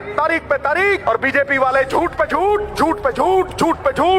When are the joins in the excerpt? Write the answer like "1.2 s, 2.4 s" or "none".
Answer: 1.0 s